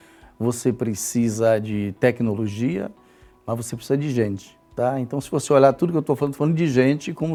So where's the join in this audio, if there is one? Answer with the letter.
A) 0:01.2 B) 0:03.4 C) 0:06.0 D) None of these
D